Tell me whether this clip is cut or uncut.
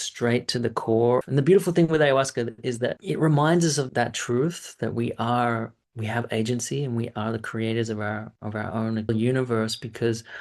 cut